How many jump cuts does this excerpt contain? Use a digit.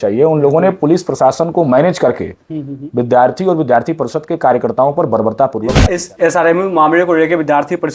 1